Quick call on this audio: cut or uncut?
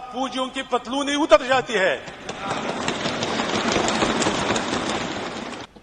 uncut